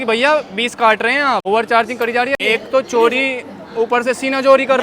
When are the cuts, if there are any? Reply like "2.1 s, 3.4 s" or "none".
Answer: 1.4 s, 2.4 s